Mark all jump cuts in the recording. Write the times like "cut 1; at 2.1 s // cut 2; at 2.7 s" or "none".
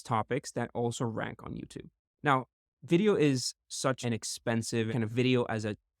cut 1; at 4.0 s // cut 2; at 4.9 s